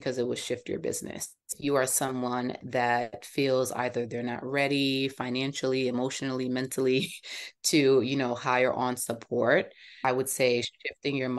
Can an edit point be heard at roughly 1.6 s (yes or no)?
yes